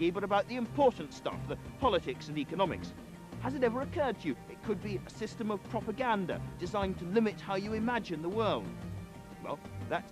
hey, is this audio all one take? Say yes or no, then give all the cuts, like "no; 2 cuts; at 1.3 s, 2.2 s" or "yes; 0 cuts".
no; 1 cut; at 7.4 s